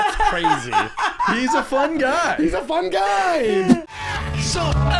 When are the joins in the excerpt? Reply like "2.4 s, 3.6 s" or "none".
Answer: 3.8 s